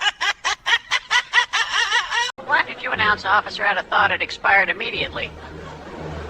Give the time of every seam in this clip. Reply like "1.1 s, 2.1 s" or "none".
2.4 s